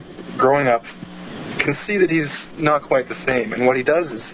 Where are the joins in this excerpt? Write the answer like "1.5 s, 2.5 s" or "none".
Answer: 2.8 s